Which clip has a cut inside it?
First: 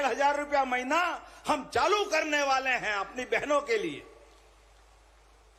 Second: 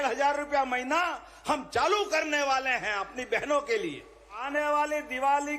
second; 1 cut; at 4.4 s

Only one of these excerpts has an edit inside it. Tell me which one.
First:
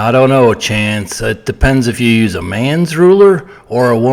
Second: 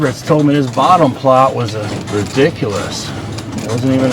second; 1 cut; at 1.9 s

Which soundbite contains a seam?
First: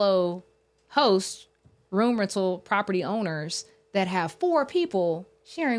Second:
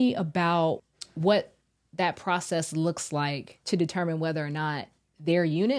second; 2 cuts; at 0.9 s, 3.6 s

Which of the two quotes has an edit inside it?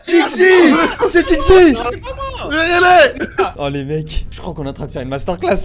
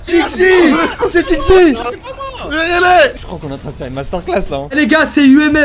second; 2 cuts; at 3.2 s, 4.7 s

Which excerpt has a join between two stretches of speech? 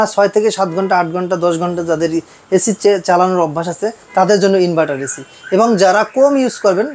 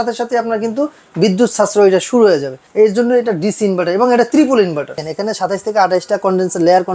second; 2 cuts; at 2.6 s, 5.0 s

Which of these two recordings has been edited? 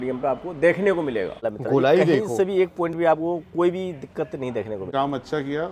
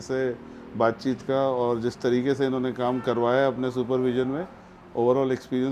first; 2 cuts; at 1.5 s, 4.9 s

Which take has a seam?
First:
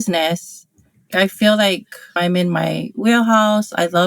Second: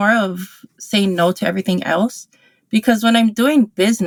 first; 2 cuts; at 1.1 s, 2.2 s

